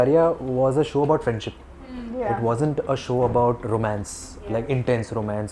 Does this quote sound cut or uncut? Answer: uncut